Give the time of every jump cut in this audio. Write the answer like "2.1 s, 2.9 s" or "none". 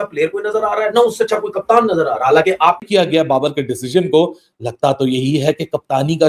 2.9 s